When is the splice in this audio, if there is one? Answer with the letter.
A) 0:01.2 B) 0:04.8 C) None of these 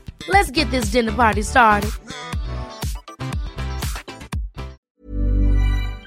B